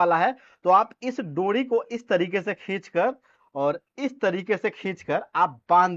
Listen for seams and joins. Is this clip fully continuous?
yes; 0 cuts

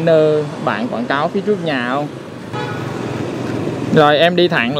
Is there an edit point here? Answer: yes; 1 cut; at 2.5 s

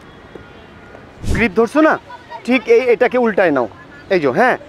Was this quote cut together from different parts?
yes; 1 cut; at 1.3 s

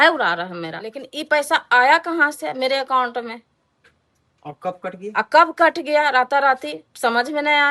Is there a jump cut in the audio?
yes; 1 cut; at 1.1 s

